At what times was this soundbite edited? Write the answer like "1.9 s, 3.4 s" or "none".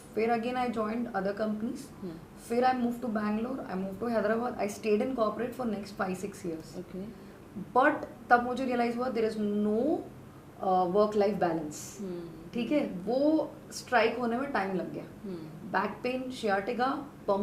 none